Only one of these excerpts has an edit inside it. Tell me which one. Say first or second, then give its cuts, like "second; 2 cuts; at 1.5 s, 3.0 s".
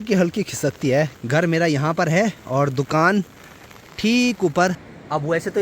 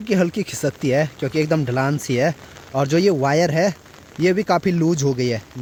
first; 2 cuts; at 1.2 s, 4.8 s